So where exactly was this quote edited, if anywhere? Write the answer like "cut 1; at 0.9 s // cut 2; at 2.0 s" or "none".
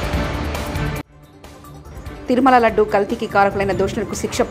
cut 1; at 1.1 s